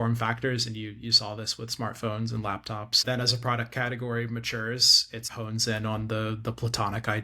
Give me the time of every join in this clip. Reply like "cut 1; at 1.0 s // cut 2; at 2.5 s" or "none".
cut 1; at 3.0 s // cut 2; at 5.3 s